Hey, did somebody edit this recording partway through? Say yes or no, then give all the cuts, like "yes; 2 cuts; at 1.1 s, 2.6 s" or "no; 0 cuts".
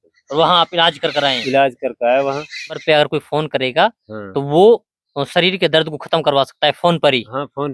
yes; 1 cut; at 2.8 s